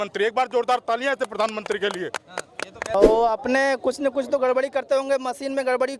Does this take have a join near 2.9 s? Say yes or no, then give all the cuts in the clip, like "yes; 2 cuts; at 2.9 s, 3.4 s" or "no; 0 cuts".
yes; 1 cut; at 2.9 s